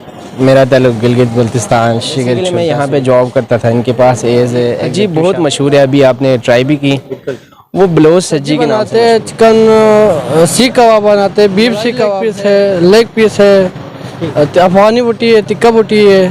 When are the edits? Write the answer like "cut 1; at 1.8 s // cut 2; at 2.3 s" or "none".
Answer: cut 1; at 2.5 s // cut 2; at 4.9 s // cut 3; at 8.8 s // cut 4; at 12.2 s